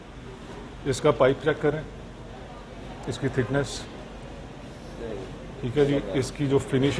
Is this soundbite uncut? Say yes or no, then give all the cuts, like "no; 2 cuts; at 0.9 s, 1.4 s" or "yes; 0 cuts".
yes; 0 cuts